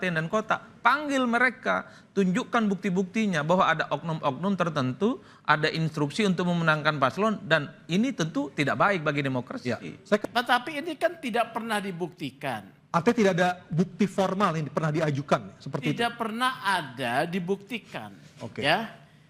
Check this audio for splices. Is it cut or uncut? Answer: cut